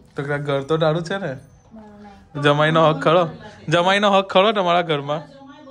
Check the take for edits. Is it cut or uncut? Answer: cut